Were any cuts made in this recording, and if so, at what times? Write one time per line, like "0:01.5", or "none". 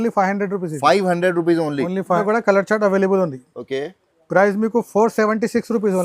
0:02.2